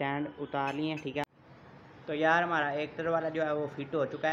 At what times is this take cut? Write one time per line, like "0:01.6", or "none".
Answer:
0:01.2